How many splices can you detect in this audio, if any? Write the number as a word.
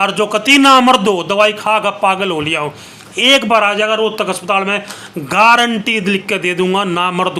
zero